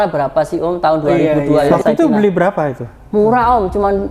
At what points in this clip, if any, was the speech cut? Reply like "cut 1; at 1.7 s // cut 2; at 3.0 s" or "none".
cut 1; at 1.7 s